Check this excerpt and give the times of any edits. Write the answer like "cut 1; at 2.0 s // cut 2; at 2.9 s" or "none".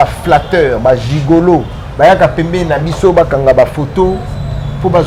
none

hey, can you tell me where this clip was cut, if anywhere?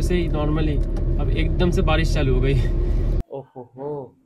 cut 1; at 3.2 s

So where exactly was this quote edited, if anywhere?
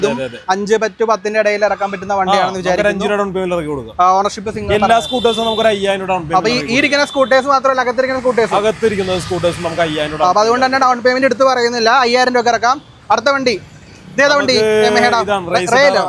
none

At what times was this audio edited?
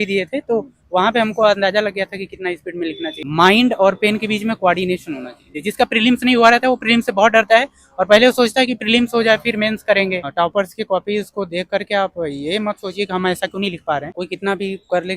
cut 1; at 3.2 s // cut 2; at 5.6 s // cut 3; at 10.3 s // cut 4; at 14.1 s

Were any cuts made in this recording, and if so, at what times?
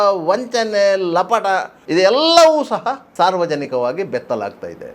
cut 1; at 1.7 s // cut 2; at 3.1 s

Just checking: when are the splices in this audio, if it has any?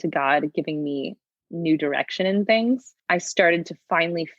cut 1; at 2.9 s

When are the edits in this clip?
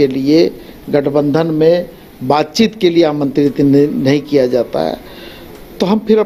none

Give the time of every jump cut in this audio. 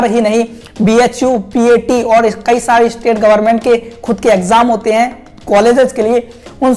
none

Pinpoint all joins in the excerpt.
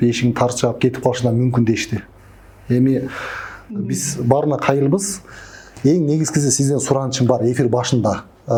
none

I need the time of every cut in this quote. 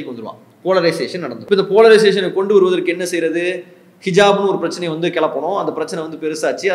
cut 1; at 1.3 s

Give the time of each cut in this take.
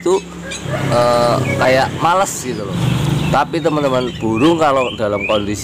cut 1; at 2.7 s

